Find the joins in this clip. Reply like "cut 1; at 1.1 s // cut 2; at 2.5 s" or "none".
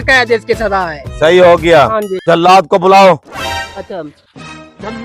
cut 1; at 2.1 s